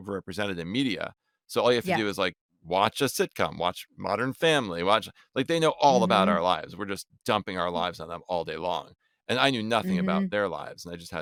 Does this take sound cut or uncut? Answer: uncut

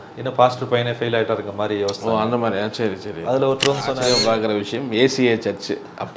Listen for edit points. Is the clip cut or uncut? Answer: cut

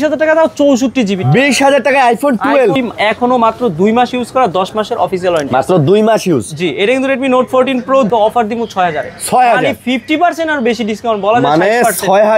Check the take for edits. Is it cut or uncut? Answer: cut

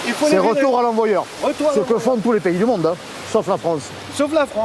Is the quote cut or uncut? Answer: uncut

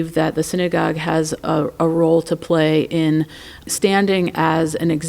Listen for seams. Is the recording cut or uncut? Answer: cut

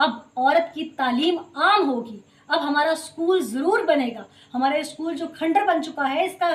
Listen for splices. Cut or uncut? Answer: uncut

